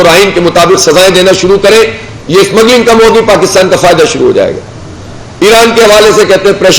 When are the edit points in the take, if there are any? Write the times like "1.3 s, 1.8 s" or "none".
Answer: none